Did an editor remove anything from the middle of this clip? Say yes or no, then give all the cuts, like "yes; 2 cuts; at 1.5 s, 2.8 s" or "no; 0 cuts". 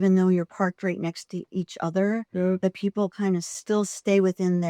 yes; 1 cut; at 3.5 s